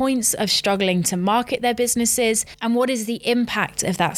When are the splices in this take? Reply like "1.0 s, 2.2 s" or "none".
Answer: 2.5 s